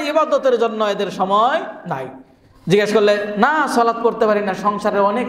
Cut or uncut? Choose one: uncut